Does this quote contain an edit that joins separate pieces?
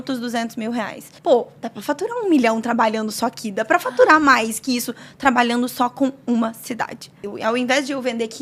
yes; 2 cuts; at 1.1 s, 7.3 s

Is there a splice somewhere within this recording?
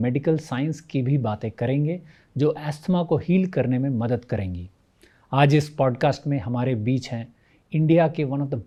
no; 0 cuts

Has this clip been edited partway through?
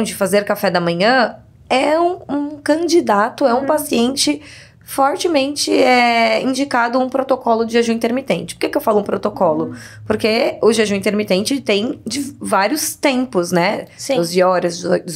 no; 0 cuts

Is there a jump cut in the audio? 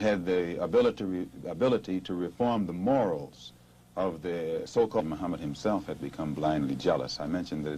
no; 0 cuts

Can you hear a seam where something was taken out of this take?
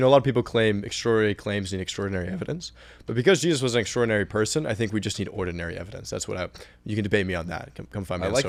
no; 0 cuts

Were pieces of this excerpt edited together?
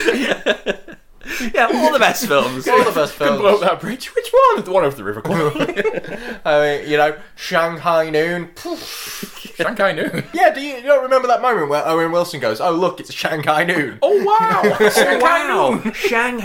yes; 1 cut; at 10.3 s

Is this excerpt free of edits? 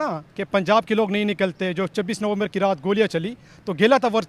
yes; 0 cuts

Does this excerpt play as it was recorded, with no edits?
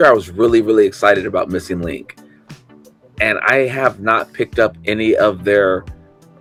yes; 0 cuts

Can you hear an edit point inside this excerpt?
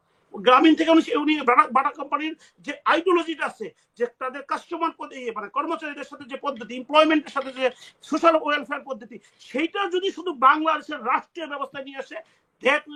no; 0 cuts

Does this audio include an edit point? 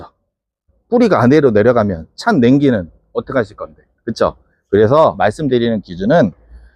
no; 0 cuts

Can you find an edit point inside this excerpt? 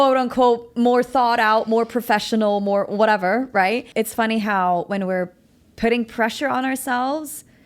yes; 1 cut; at 3.9 s

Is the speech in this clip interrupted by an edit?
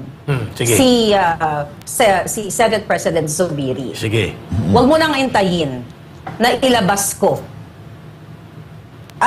no; 0 cuts

